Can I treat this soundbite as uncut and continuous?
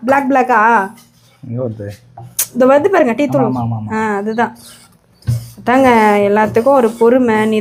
yes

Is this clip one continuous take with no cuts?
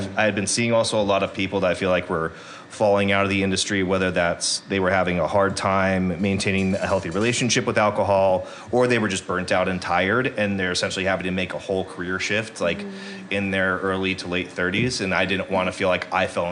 yes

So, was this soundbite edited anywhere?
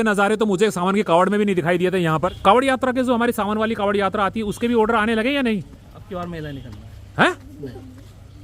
yes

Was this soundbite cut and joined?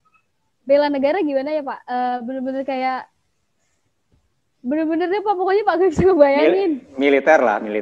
no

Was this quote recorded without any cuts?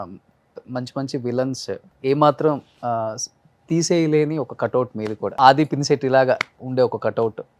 no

